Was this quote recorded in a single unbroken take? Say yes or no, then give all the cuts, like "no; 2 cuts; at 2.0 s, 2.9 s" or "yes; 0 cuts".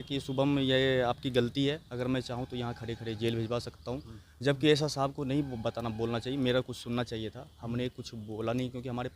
yes; 0 cuts